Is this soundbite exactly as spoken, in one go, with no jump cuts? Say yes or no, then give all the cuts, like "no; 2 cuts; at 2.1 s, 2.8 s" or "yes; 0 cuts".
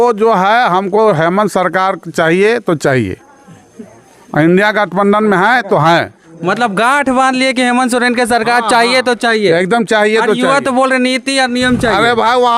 yes; 0 cuts